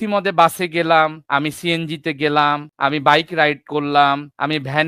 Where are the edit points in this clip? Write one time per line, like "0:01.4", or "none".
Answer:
none